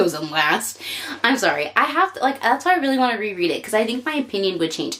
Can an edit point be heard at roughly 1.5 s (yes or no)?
no